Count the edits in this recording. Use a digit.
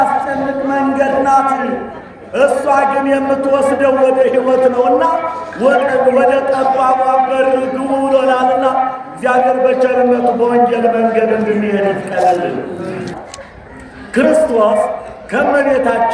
1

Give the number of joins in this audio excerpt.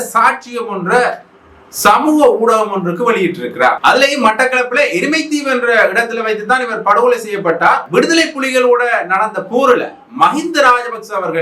2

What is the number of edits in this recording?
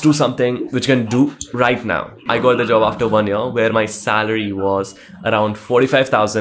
1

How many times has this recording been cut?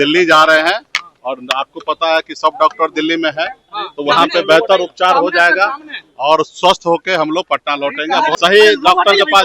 1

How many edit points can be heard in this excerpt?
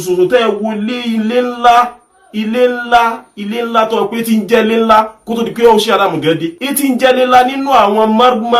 1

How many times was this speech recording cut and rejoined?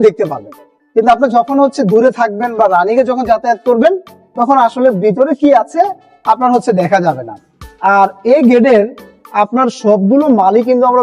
0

